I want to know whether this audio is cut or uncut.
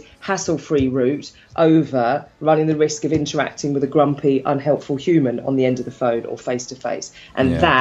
uncut